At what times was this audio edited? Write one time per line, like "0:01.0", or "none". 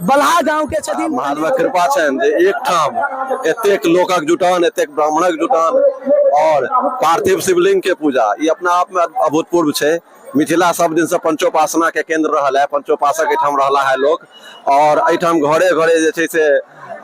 0:01.0